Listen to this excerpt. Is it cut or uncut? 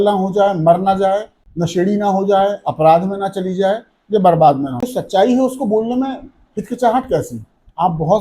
cut